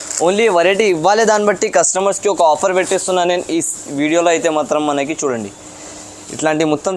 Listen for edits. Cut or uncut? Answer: uncut